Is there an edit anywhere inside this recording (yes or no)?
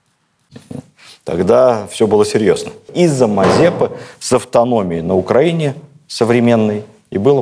yes